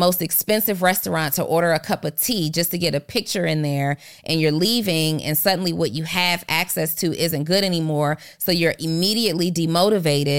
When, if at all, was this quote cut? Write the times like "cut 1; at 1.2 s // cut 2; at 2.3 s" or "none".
none